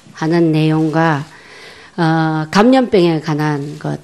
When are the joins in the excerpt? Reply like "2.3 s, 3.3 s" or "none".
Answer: 2.5 s